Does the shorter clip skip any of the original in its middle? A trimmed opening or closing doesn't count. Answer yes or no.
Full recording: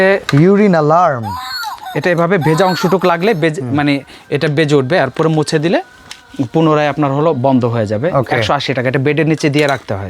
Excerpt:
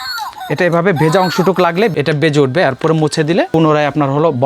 yes